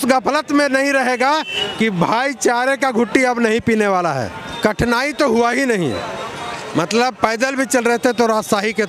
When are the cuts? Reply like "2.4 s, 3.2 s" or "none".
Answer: 4.4 s

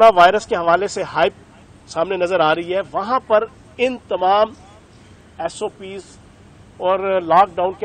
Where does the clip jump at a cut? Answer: none

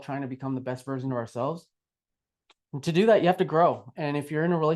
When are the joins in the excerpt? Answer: none

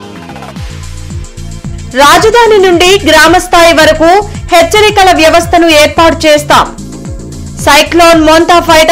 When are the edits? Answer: 1.0 s

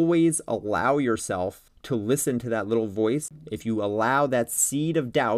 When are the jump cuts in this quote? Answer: 1.7 s, 3.4 s

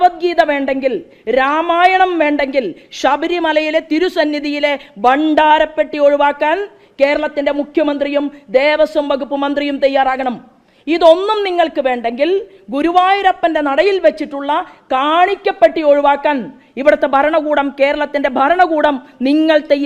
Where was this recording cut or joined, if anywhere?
none

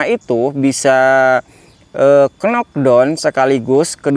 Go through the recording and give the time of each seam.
none

